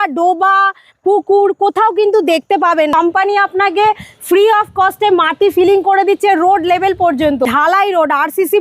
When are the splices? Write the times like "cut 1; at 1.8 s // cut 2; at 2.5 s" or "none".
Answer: cut 1; at 2.9 s // cut 2; at 7.5 s